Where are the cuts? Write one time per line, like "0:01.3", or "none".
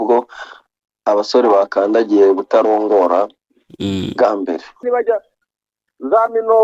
0:04.8